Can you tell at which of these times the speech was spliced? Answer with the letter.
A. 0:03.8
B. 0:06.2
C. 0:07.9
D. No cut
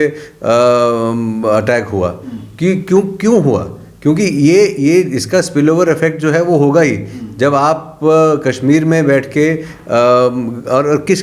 D